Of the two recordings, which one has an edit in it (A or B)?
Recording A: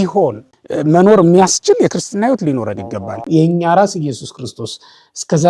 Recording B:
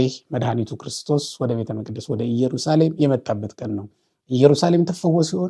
A